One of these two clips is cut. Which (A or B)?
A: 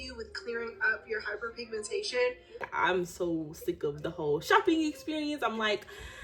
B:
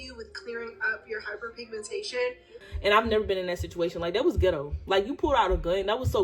B